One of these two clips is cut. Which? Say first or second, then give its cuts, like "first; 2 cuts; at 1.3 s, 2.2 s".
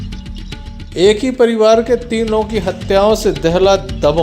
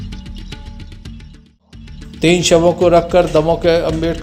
first; 1 cut; at 0.9 s